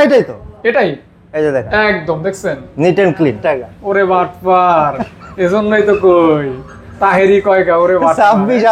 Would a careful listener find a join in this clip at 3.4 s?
yes; 1 cut; at 3.4 s

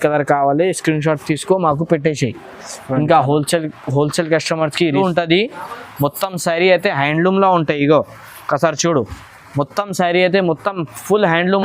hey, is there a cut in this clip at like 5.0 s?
yes; 1 cut; at 5.0 s

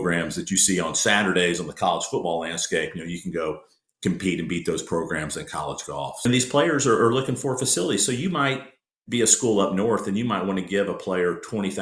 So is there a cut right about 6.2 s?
yes; 1 cut; at 6.2 s

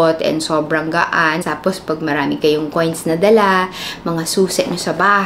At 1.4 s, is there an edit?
yes; 1 cut; at 1.4 s

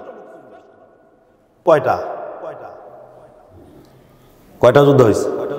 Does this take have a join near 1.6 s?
yes; 1 cut; at 1.6 s

